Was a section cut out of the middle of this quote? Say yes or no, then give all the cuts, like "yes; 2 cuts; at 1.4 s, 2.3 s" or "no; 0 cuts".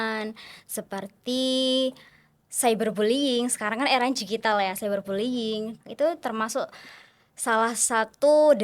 yes; 1 cut; at 5.8 s